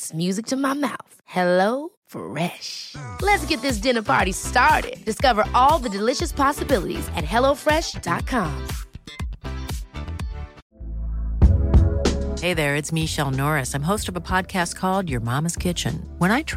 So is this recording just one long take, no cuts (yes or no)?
no